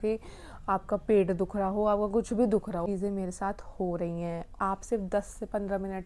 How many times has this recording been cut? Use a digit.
2